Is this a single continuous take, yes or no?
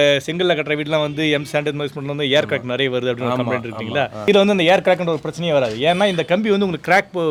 yes